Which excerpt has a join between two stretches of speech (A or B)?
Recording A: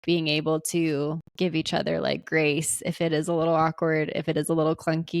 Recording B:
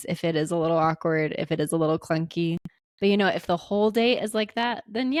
A